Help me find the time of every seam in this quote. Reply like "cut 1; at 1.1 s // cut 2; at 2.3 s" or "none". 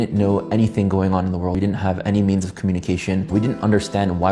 cut 1; at 1.5 s // cut 2; at 3.3 s